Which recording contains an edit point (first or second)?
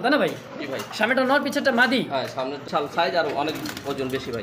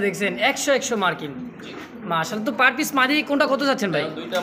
first